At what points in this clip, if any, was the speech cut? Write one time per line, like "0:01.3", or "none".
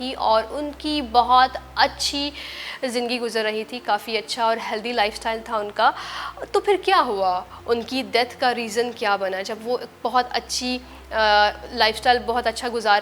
none